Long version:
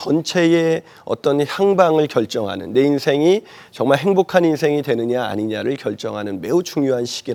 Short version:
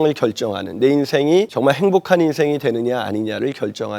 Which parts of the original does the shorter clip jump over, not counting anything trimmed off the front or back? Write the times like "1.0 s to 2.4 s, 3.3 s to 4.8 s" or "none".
3.5 s to 3.8 s